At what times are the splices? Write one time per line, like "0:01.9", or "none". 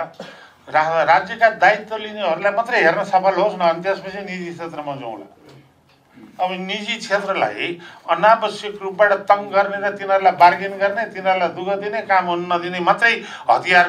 none